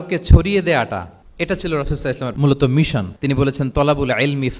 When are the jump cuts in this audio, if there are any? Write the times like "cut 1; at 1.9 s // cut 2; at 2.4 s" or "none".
cut 1; at 1.2 s // cut 2; at 2.3 s // cut 3; at 3.1 s